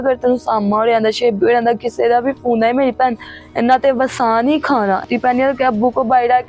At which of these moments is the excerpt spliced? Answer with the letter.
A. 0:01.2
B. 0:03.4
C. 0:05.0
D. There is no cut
C